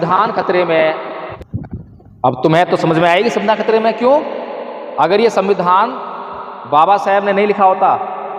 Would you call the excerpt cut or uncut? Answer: cut